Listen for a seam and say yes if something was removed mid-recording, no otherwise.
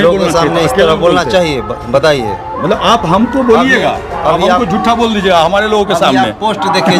no